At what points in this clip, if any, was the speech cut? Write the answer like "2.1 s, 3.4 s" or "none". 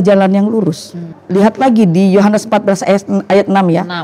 1.2 s